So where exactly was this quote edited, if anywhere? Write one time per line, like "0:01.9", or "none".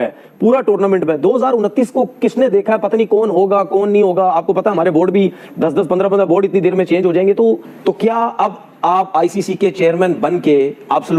none